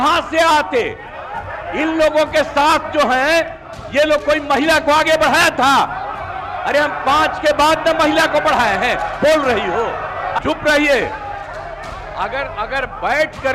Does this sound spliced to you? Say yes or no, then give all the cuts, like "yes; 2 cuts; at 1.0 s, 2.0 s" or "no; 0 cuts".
yes; 1 cut; at 10.4 s